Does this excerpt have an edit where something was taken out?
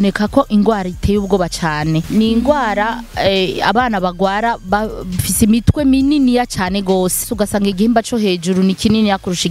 yes; 2 cuts; at 2.0 s, 7.3 s

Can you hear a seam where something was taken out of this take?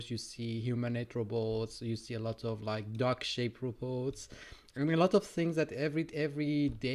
no; 0 cuts

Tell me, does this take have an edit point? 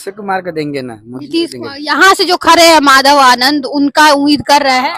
no; 0 cuts

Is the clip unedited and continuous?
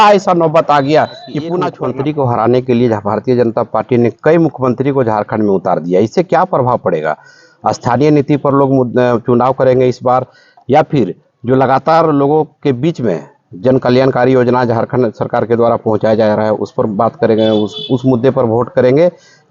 no; 1 cut; at 1.7 s

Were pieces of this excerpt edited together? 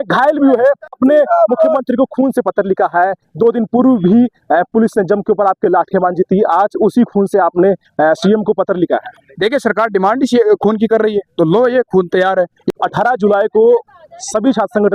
yes; 2 cuts; at 0.9 s, 12.6 s

